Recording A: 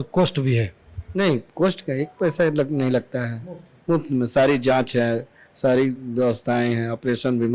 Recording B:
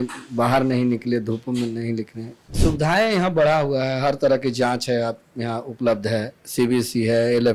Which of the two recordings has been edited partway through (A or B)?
B